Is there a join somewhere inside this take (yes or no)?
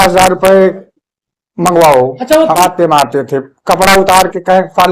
yes